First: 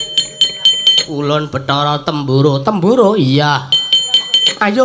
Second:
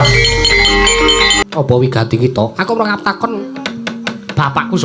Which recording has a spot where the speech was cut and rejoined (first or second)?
second